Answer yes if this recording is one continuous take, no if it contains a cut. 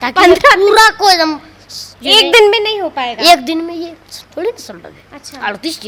yes